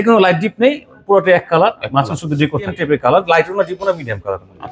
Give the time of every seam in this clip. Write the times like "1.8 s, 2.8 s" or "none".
2.8 s